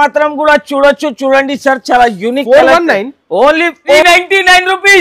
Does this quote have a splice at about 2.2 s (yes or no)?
no